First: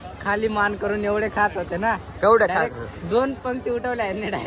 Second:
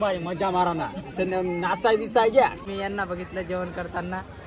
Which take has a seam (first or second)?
second